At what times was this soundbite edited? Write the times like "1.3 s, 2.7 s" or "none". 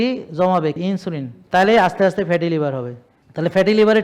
0.9 s